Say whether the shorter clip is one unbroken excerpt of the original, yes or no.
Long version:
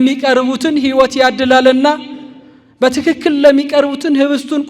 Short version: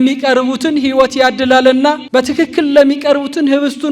no